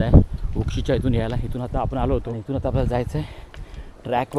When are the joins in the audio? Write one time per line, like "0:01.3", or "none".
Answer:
0:02.3